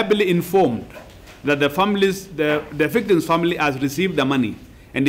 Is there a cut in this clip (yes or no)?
no